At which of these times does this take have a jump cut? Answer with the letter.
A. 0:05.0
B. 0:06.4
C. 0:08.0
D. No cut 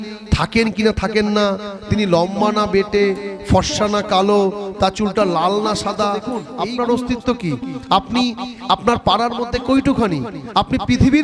B